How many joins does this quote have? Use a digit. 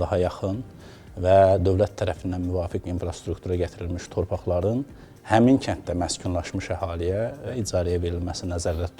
1